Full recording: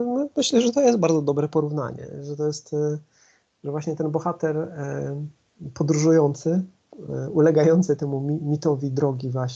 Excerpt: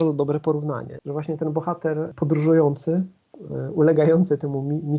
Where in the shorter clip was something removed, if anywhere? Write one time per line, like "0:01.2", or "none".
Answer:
0:00.9
0:02.1